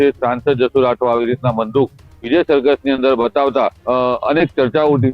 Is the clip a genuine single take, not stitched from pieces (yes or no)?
no